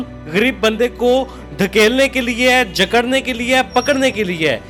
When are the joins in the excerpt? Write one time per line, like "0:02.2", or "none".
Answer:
none